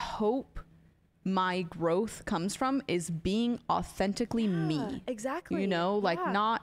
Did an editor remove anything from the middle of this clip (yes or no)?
no